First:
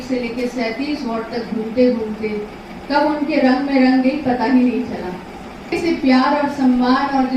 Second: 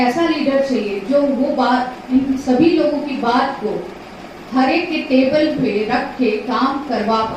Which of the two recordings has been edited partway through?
first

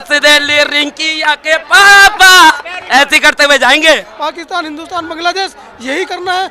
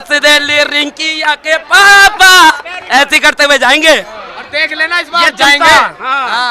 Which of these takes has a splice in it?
first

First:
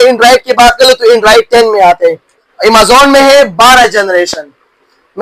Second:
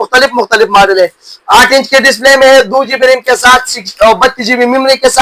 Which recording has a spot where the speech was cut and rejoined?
first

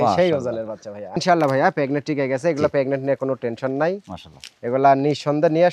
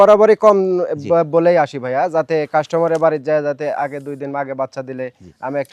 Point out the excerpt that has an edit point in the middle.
first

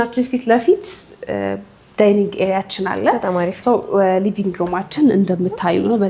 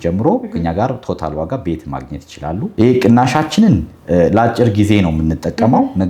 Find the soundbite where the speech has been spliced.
second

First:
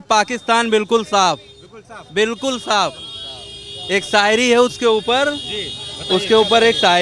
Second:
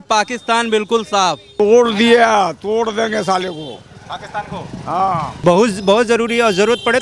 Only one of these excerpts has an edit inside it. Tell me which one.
second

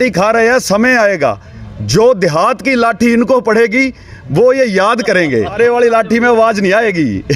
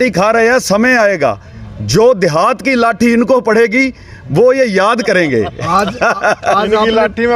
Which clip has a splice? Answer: first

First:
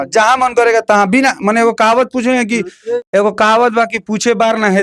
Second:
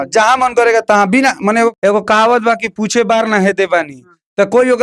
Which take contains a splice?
second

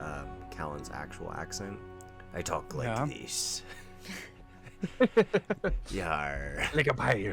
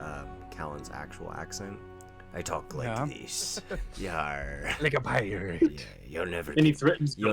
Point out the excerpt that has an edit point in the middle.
second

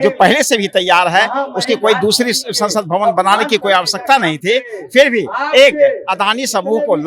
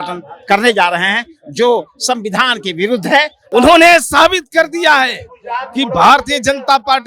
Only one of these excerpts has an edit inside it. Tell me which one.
second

